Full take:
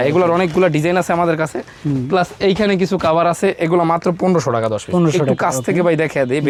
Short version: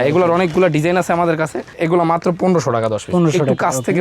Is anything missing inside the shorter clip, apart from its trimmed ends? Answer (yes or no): yes